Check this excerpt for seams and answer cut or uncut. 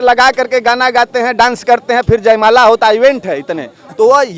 uncut